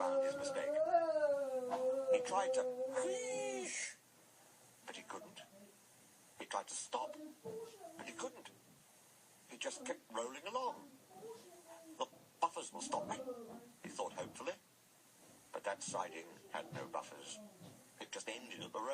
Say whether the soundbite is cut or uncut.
uncut